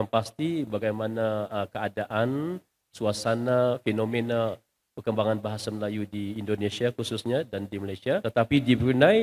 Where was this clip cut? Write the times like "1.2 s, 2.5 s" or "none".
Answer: 8.2 s